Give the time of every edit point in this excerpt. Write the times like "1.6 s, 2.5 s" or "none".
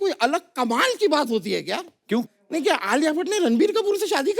2.6 s